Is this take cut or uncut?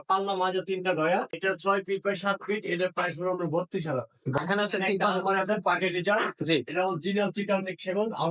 cut